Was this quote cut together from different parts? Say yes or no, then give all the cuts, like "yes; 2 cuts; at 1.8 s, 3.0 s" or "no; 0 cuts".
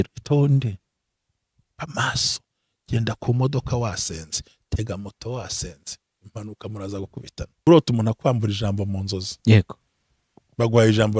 yes; 1 cut; at 7.7 s